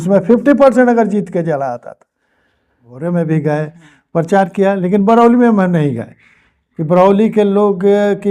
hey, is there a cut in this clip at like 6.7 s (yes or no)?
no